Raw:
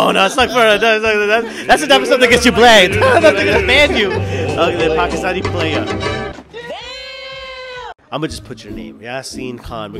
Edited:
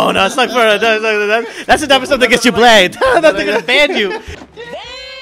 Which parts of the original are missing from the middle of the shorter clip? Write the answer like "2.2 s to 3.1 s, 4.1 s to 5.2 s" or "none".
4.3 s to 6.3 s